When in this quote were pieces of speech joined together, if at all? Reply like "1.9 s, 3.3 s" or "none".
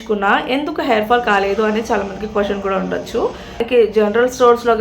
3.6 s

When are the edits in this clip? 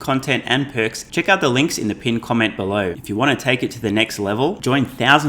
1.0 s, 3.0 s

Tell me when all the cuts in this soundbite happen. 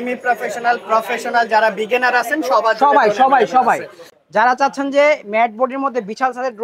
4.0 s

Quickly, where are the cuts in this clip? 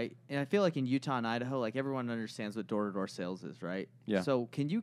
none

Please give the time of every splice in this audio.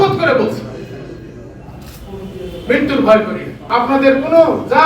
3.6 s

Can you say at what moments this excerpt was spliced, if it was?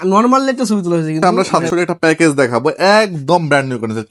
1.2 s

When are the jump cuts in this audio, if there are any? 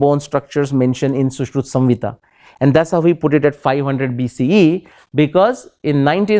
none

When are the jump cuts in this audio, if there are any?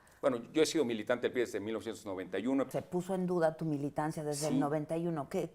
2.7 s

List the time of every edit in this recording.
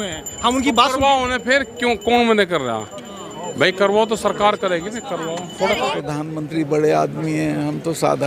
5.9 s

